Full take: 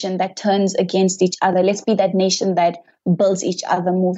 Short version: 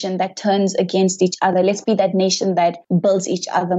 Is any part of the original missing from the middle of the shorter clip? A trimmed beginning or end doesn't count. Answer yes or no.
yes